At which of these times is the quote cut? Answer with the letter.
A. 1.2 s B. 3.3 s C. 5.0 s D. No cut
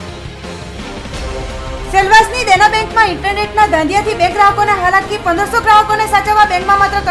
D